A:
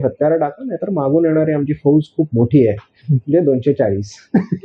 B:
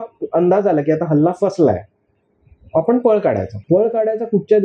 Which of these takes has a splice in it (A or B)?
B